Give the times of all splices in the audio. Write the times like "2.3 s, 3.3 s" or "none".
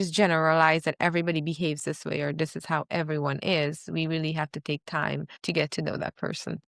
5.3 s